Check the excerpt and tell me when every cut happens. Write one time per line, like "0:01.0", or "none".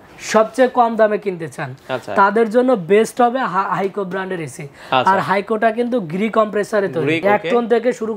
0:07.2